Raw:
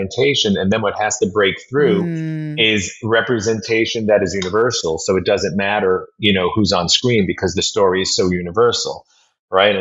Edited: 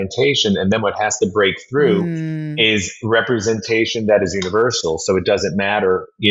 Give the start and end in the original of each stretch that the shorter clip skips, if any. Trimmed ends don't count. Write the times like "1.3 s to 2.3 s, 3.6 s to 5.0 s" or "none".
none

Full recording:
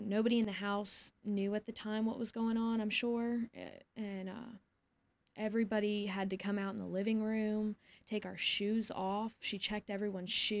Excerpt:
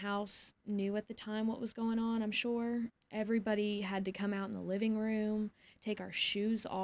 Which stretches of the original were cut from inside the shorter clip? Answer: 3.6 s to 5.3 s

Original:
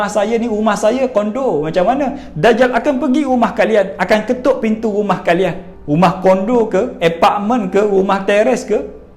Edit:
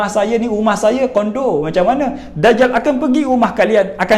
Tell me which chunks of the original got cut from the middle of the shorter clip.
none

